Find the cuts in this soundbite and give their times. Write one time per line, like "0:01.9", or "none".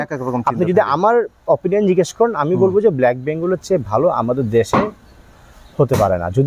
none